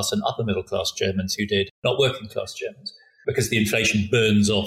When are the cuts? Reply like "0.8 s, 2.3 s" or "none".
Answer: 1.7 s, 3.0 s